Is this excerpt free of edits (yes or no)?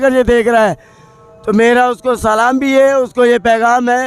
yes